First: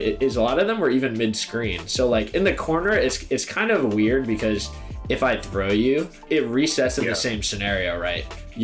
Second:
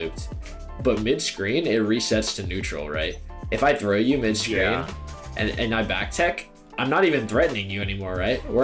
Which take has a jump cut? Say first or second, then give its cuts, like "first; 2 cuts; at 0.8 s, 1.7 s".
second; 3 cuts; at 0.8 s, 3.3 s, 6.6 s